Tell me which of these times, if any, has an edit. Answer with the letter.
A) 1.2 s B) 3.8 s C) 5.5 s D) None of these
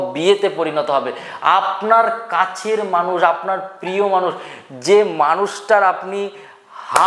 D